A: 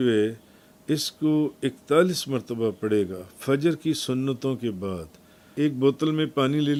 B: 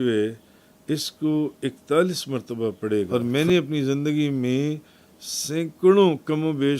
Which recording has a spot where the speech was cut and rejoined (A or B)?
B